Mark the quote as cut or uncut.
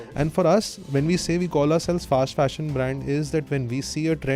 uncut